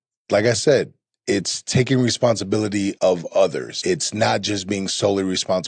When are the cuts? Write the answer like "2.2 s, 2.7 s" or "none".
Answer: 3.0 s, 3.7 s

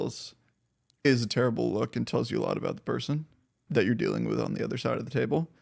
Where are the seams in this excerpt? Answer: 1.1 s, 3.6 s

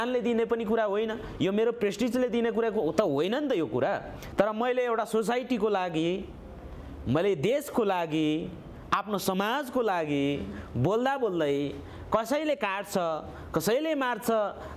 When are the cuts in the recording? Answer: 4.2 s

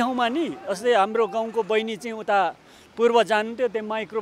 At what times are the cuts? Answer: none

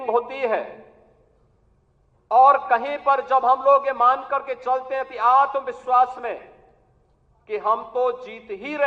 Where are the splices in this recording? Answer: none

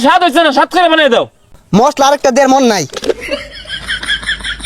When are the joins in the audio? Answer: 1.5 s, 3.4 s

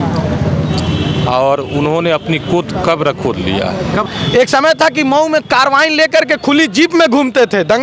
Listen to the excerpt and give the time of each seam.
4.0 s

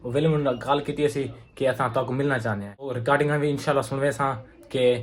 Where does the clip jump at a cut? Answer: 3.0 s

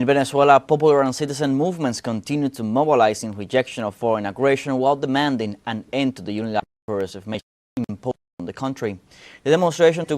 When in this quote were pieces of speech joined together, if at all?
1.3 s

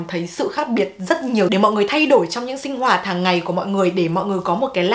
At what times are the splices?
1.5 s

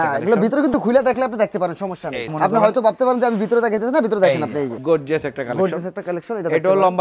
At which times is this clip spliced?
2.3 s, 4.8 s

